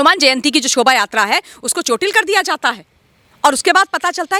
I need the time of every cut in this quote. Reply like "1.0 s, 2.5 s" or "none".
none